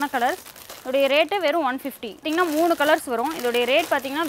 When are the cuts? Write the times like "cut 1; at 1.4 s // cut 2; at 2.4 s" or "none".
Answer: cut 1; at 2.2 s